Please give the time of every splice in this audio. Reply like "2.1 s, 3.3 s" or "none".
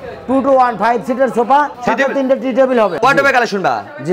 1.8 s, 3.0 s